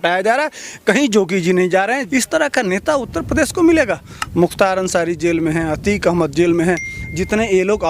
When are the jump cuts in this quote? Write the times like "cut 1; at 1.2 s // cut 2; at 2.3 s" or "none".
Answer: cut 1; at 2.0 s